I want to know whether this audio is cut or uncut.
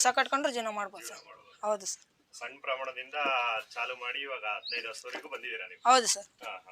uncut